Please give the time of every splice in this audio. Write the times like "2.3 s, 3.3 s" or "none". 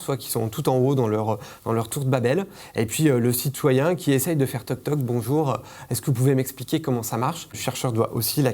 7.6 s